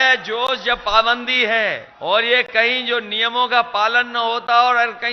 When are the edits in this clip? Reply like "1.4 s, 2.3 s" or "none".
1.9 s